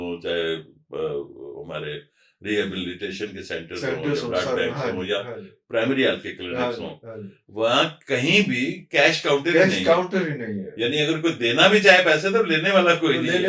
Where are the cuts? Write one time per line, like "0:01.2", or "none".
none